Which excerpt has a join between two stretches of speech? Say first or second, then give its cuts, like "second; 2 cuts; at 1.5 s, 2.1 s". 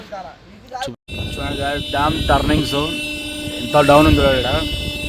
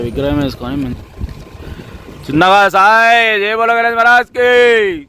first; 1 cut; at 0.9 s